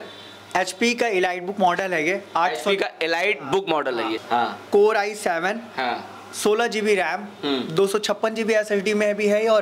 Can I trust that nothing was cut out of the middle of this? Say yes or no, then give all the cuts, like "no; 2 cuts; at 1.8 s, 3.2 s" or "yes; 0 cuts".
no; 1 cut; at 4.2 s